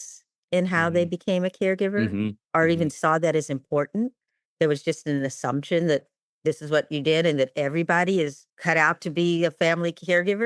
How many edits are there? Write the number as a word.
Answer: one